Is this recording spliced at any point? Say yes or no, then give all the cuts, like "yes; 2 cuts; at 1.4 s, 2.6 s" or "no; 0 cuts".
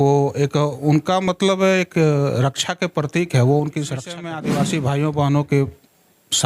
yes; 1 cut; at 4.4 s